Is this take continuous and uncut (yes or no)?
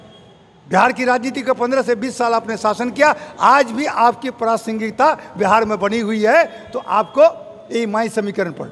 yes